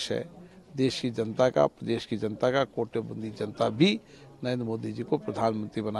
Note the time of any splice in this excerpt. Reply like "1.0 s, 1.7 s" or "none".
none